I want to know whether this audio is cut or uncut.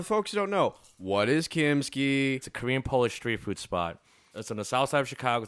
cut